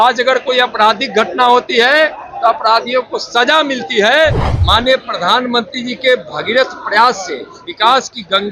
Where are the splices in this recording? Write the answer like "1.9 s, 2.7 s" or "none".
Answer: 4.5 s